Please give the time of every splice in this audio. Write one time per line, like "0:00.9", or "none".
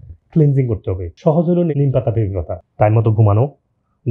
0:02.6